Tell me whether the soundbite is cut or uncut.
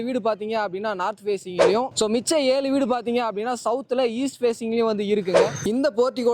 cut